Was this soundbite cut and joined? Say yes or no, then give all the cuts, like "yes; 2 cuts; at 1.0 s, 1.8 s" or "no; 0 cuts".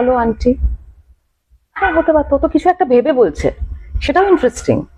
no; 0 cuts